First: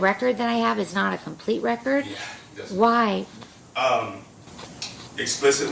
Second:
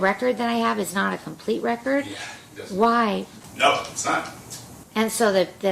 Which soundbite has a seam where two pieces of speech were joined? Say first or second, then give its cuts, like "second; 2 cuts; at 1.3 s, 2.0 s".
second; 2 cuts; at 3.4 s, 4.7 s